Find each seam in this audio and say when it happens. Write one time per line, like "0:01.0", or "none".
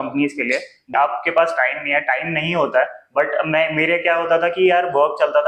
0:00.9